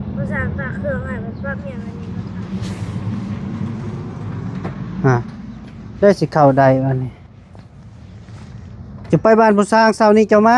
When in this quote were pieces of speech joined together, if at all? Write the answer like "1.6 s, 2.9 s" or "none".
1.9 s

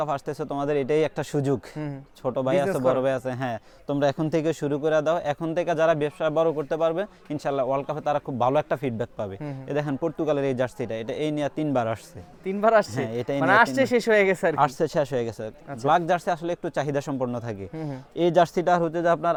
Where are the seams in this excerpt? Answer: none

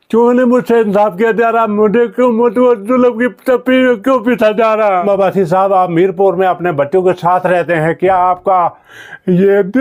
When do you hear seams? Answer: 5.0 s

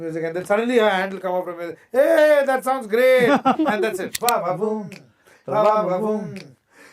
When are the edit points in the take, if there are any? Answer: 4.1 s

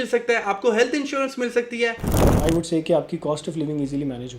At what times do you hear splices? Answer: 2.2 s

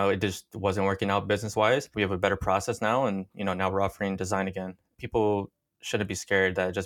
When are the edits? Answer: none

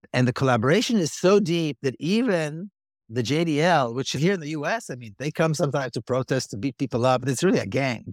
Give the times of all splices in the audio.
4.1 s, 7.2 s

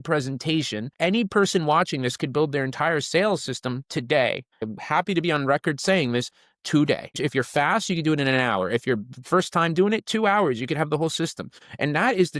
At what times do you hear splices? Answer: 0.9 s, 4.7 s, 7.1 s

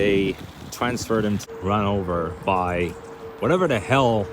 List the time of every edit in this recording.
1.4 s

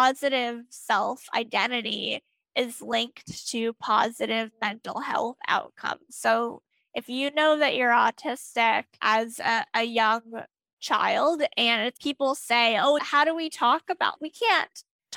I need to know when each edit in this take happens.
none

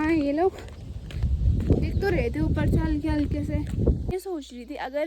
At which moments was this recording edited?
4.1 s

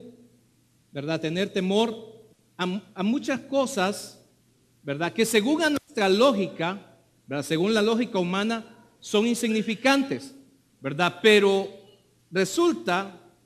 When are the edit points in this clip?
12.3 s

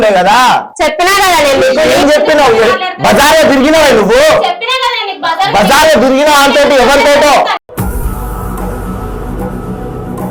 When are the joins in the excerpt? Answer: none

